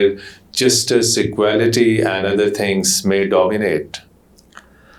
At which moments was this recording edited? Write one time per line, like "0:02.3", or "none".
none